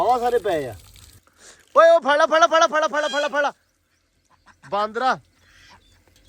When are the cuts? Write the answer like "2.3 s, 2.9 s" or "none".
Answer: 1.1 s